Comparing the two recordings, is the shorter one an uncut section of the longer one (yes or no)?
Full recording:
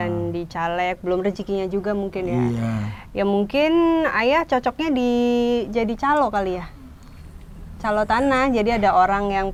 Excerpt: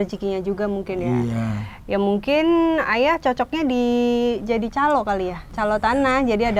no